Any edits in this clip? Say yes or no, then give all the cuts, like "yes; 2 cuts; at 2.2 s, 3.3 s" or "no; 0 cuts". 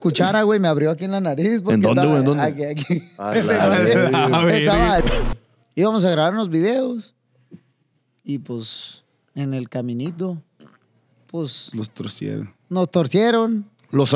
yes; 1 cut; at 5.0 s